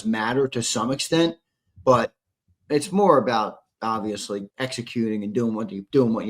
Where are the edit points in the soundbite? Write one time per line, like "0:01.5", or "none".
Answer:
0:04.5